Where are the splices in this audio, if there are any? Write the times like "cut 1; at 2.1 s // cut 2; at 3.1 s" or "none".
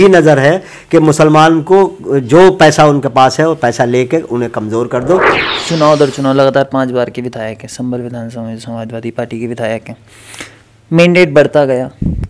cut 1; at 5.4 s